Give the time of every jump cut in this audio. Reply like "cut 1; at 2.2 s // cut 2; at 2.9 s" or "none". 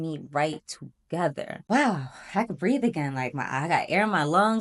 cut 1; at 1.6 s